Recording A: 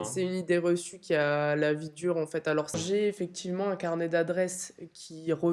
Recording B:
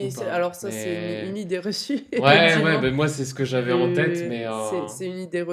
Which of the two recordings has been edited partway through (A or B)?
A